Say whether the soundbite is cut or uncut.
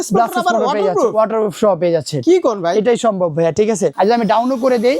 cut